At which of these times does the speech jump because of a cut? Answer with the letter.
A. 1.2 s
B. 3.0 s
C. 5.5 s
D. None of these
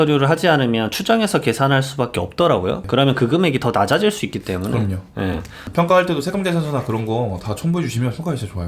D